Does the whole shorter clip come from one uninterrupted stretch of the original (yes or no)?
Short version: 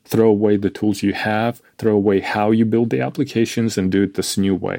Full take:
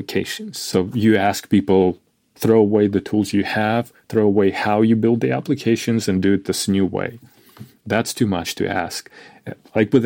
yes